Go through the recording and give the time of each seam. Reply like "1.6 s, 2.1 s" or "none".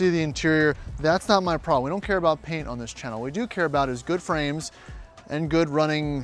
none